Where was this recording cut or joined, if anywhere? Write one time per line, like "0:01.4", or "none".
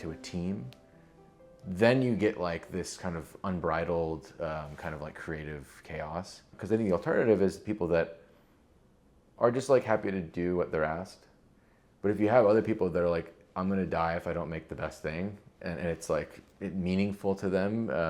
0:06.4